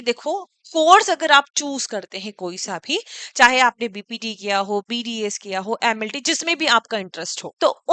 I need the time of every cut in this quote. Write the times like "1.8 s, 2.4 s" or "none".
none